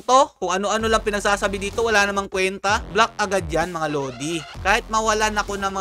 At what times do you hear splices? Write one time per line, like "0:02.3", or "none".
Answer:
0:04.5